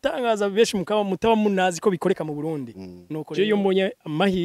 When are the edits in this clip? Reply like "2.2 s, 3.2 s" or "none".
3.2 s